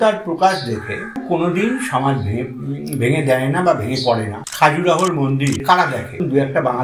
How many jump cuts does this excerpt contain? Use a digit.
3